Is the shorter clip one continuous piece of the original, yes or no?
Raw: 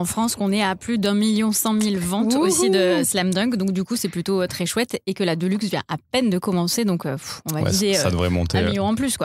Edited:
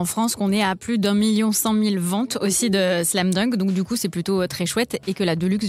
yes